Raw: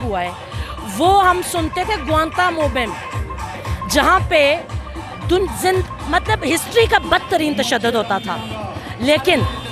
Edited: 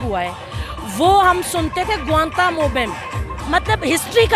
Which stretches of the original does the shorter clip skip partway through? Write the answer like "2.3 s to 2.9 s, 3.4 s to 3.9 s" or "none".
3.4 s to 6.0 s

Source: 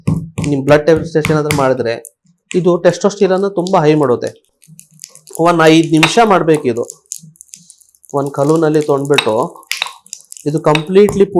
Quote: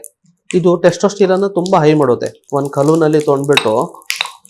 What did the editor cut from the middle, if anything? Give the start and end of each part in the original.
4.4 s to 8.0 s

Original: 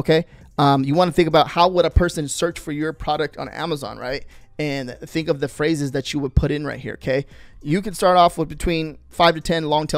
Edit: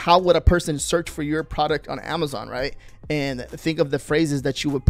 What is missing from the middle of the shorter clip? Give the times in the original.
none

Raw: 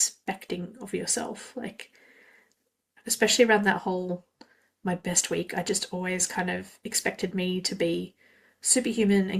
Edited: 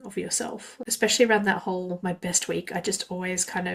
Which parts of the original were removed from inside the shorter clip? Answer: 1.6 s to 3.0 s, 4.2 s to 4.8 s

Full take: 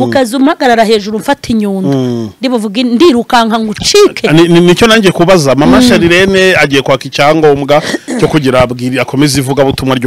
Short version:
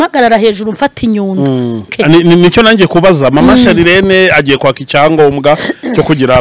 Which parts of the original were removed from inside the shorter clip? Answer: 2.4 s to 4.2 s

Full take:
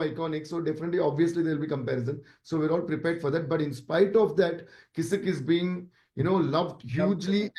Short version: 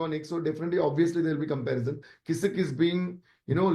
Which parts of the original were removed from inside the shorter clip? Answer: 2.3 s to 4.8 s

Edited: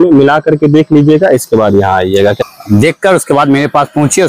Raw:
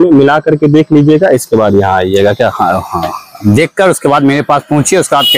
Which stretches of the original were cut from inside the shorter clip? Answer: 2.4 s to 3.1 s

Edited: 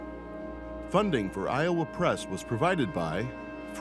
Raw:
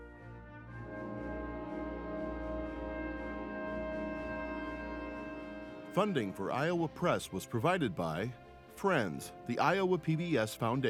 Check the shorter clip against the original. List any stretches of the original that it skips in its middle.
2.7 s to 5.9 s

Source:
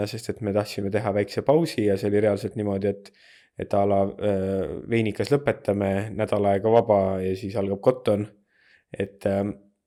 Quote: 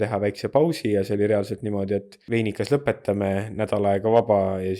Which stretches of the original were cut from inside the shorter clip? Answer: 3.1 s to 4.8 s

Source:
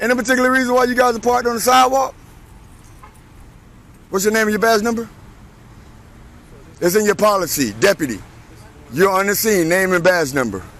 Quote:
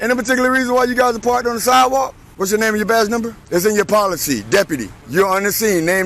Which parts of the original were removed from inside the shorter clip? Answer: 2.2 s to 4.0 s, 5.1 s to 6.7 s, 8.2 s to 8.8 s

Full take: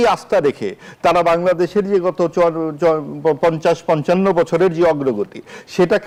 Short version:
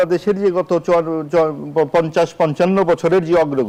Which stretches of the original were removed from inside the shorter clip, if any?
none

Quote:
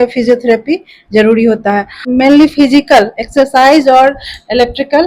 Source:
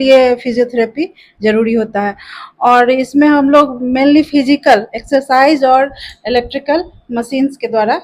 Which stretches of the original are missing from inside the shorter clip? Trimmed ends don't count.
2.3 s to 3.8 s

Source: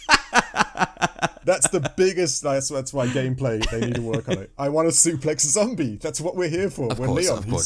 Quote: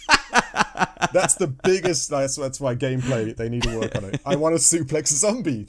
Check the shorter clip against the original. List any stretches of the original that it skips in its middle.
1.1 s to 1.4 s

